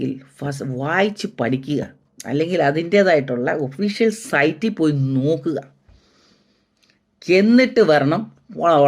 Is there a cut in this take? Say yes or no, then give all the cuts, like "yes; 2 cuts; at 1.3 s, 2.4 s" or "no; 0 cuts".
no; 0 cuts